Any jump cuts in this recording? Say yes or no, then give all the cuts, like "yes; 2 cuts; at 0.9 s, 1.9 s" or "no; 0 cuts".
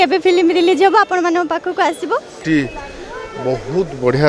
yes; 1 cut; at 2.3 s